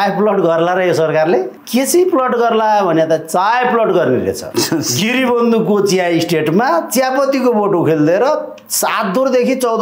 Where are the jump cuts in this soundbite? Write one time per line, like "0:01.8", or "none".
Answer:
0:01.6
0:04.4